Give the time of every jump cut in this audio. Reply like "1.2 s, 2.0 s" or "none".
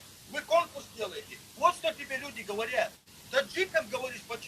3.3 s

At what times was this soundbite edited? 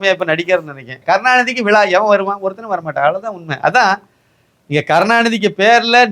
0.9 s

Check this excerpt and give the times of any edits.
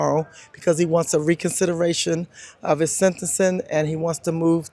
none

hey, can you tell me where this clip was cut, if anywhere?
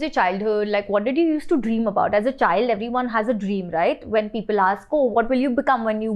none

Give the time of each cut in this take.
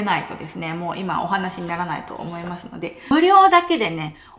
3.1 s

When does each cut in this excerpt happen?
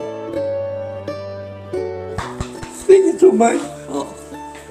2.2 s

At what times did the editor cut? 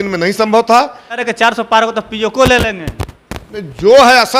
1.2 s

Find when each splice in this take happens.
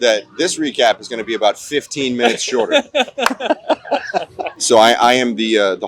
4.4 s

